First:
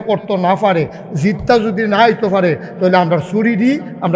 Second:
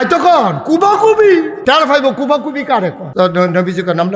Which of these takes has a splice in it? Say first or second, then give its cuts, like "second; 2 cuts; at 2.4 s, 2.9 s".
second; 2 cuts; at 1.5 s, 3.0 s